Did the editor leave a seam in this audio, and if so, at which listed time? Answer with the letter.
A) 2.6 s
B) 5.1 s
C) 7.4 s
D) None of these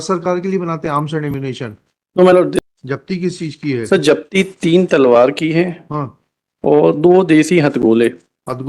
A